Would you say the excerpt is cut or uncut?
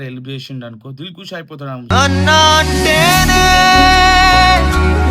uncut